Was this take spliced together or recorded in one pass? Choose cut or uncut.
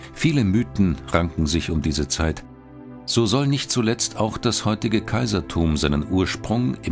cut